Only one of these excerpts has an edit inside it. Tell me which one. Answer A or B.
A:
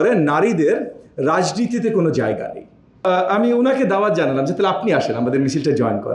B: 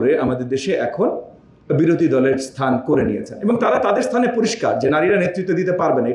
A